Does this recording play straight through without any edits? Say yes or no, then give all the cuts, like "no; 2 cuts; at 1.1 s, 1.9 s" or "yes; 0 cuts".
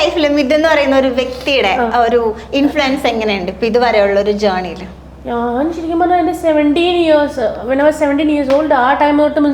yes; 0 cuts